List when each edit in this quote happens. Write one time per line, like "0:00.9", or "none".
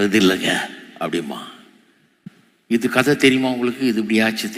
none